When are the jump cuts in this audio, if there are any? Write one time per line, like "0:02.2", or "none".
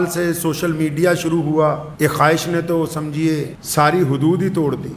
0:01.9
0:03.6